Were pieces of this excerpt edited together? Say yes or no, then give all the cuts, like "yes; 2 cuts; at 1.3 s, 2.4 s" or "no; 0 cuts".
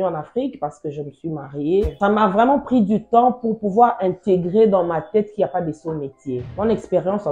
yes; 2 cuts; at 1.9 s, 6.5 s